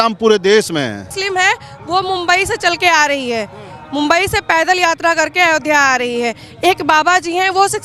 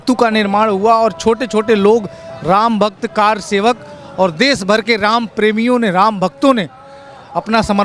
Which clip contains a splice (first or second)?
first